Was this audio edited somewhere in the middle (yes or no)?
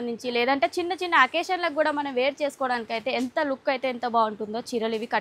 no